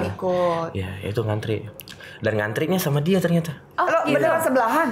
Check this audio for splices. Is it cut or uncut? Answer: uncut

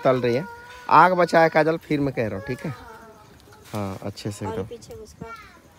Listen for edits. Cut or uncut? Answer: uncut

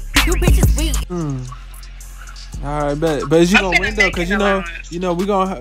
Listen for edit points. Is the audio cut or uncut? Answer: uncut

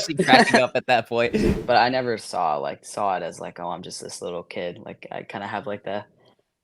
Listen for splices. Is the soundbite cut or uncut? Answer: cut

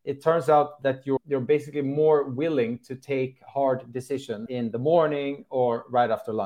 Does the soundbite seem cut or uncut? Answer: cut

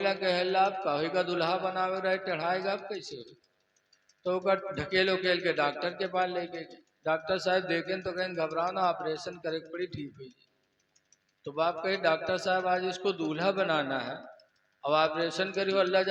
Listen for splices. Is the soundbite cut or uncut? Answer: uncut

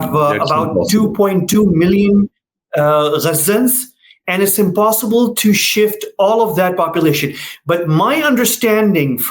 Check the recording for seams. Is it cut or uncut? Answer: uncut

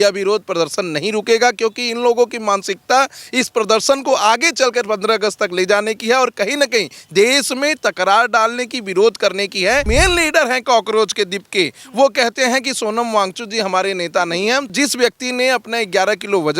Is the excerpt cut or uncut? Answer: cut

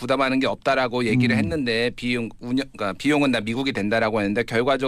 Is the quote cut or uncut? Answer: uncut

